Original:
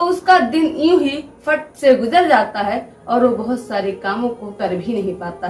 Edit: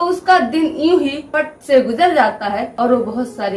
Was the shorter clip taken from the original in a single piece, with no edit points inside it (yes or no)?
no